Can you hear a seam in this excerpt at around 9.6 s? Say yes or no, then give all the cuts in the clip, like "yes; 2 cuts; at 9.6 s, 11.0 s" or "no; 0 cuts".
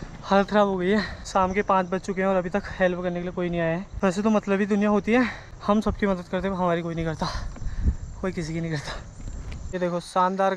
yes; 4 cuts; at 1.2 s, 3.9 s, 5.5 s, 9.6 s